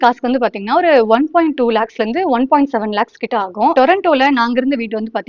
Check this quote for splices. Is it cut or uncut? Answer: cut